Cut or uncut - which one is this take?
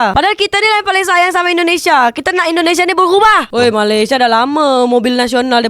cut